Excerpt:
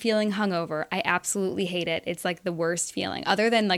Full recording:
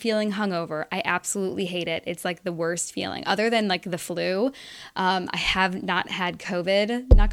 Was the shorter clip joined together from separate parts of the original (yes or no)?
no